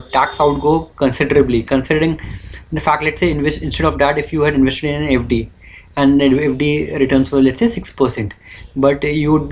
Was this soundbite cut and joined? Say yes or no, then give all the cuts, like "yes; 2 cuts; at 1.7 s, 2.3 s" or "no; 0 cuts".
no; 0 cuts